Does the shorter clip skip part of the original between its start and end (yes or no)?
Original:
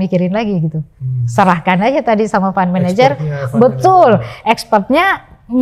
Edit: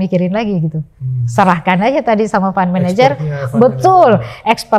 no